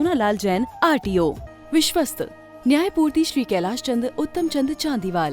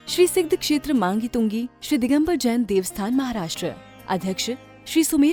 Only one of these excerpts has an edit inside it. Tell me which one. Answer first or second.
first